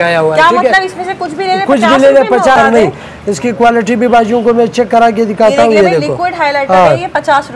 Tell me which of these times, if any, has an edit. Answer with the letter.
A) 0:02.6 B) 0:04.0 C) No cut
A